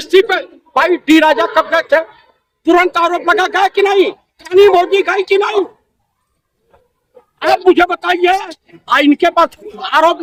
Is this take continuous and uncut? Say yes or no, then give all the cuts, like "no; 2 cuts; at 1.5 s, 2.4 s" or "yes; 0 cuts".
yes; 0 cuts